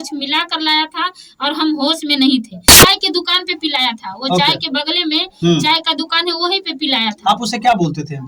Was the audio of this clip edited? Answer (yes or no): yes